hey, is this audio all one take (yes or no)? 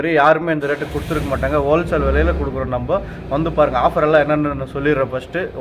yes